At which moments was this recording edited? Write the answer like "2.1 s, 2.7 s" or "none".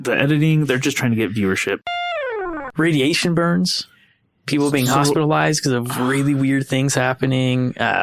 2.0 s